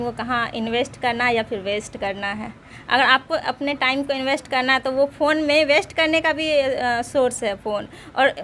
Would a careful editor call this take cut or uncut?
uncut